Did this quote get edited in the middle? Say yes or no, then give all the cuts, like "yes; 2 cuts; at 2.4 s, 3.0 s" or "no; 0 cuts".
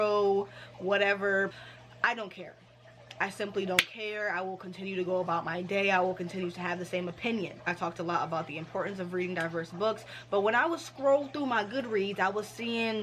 yes; 2 cuts; at 1.5 s, 7.7 s